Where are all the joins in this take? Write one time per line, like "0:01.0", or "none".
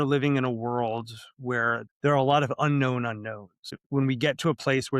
0:01.8
0:03.7